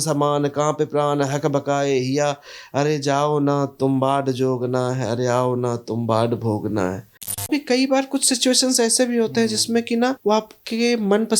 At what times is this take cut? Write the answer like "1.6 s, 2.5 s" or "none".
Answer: 7.5 s, 10.2 s